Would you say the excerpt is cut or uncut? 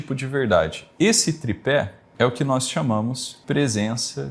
cut